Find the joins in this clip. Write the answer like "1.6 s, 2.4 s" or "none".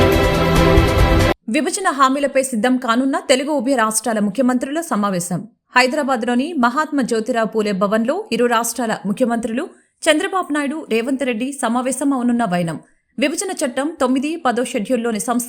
1.3 s